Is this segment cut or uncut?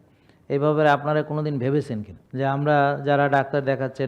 cut